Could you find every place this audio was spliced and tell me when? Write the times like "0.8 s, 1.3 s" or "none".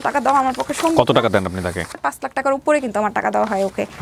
2.0 s